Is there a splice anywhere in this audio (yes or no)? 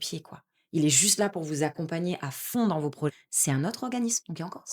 yes